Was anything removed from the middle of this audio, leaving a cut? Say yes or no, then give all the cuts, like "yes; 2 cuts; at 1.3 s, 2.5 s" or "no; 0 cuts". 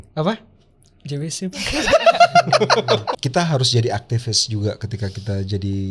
yes; 1 cut; at 3.2 s